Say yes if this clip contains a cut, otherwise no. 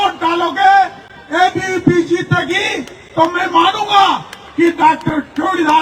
no